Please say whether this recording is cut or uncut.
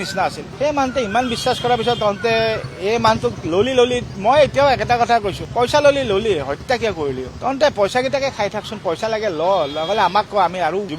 uncut